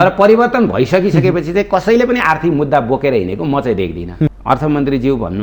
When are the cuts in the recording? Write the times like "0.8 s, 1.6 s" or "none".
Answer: 4.4 s